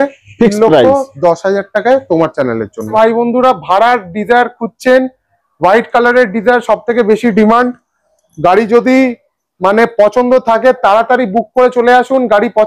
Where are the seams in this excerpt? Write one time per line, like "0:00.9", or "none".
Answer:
0:02.9